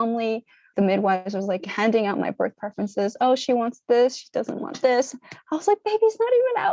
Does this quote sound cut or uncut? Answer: uncut